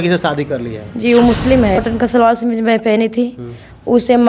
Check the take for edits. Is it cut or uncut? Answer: cut